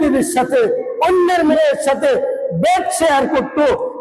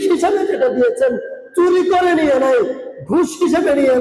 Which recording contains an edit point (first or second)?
first